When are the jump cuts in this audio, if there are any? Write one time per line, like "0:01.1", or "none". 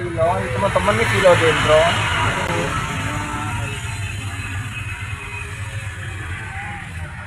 none